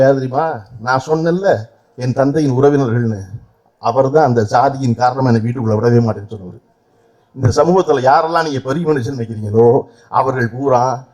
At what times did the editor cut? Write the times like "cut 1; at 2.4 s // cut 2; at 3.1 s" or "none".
none